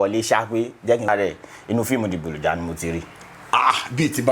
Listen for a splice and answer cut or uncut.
cut